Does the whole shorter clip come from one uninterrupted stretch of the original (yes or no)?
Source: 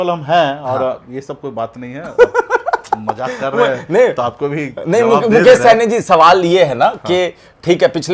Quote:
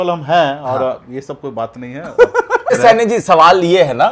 no